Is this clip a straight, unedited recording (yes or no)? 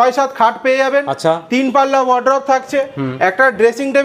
yes